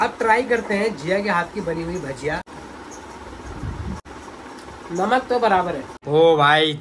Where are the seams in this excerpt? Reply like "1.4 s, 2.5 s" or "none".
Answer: 2.5 s, 4.0 s, 5.9 s